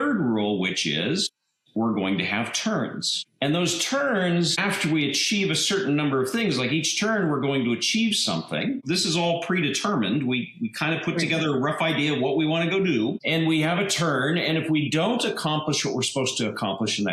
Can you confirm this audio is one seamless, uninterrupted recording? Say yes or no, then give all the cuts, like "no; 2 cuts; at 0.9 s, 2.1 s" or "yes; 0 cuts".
yes; 0 cuts